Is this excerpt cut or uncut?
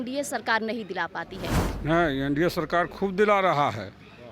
cut